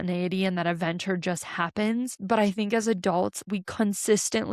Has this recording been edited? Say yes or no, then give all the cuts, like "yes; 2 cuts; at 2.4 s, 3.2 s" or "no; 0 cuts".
yes; 2 cuts; at 2.2 s, 3.4 s